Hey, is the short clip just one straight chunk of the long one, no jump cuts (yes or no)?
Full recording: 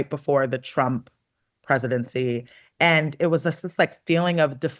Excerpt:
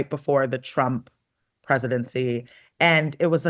yes